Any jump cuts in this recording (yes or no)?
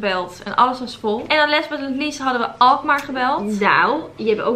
no